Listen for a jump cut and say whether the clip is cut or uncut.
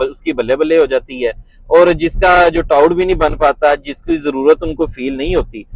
uncut